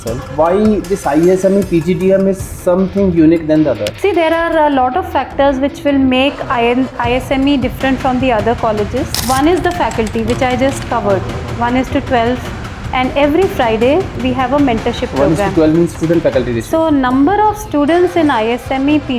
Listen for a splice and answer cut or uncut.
uncut